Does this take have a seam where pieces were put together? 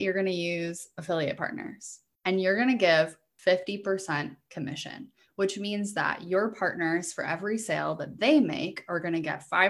yes; 1 cut; at 3.2 s

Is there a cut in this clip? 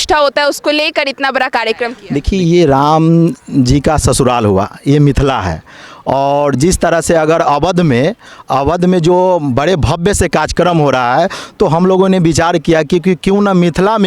yes; 1 cut; at 2.0 s

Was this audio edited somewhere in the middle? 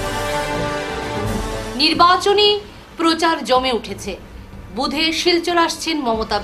no; 0 cuts

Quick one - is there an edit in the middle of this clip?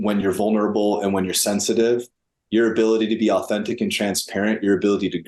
no; 0 cuts

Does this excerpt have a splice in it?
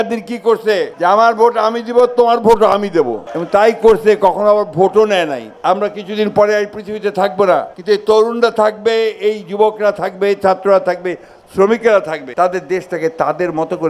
yes; 4 cuts; at 0.9 s, 5.5 s, 7.7 s, 12.2 s

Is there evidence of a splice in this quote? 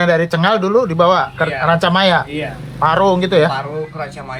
no; 0 cuts

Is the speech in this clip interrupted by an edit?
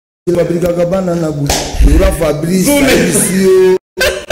no; 0 cuts

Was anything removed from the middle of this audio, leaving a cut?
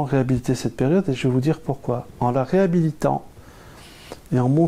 no; 0 cuts

